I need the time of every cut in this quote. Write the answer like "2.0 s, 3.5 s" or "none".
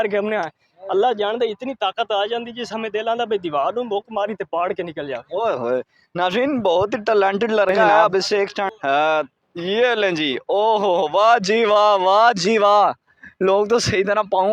8.7 s